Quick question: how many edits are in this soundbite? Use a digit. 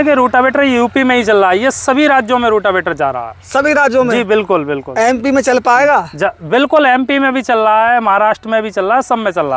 0